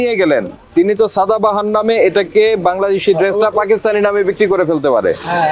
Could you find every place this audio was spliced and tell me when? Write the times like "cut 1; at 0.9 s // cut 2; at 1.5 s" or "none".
none

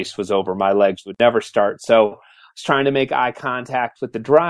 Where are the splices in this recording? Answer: cut 1; at 1.0 s

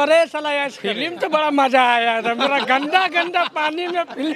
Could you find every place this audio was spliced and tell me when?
cut 1; at 1.1 s

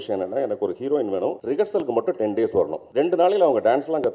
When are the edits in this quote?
cut 1; at 1.4 s // cut 2; at 2.8 s

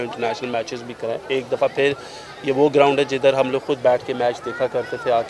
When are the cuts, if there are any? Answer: none

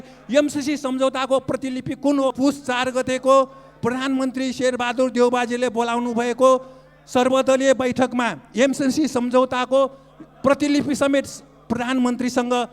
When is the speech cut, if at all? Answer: cut 1; at 2.3 s

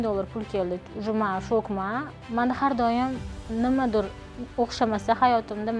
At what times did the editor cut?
cut 1; at 2.1 s

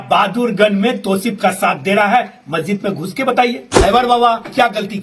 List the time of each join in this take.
cut 1; at 3.7 s

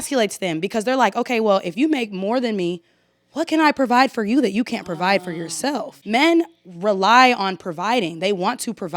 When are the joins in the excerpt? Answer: cut 1; at 5.9 s

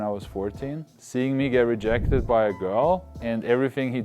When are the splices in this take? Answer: cut 1; at 0.9 s // cut 2; at 3.1 s

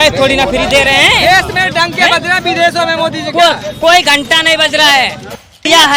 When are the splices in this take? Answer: none

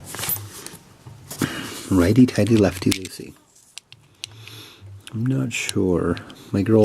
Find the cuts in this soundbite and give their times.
cut 1; at 2.9 s

